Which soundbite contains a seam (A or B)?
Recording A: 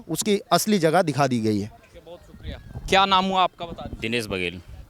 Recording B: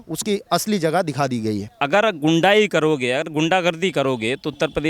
B